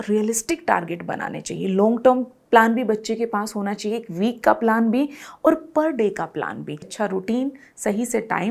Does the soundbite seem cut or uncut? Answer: cut